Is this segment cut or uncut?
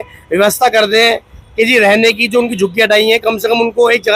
uncut